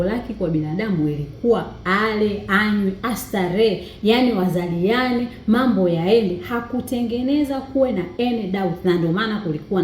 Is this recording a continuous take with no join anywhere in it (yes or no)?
yes